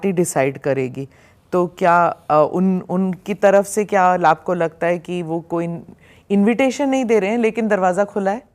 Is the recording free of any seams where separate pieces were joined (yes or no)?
yes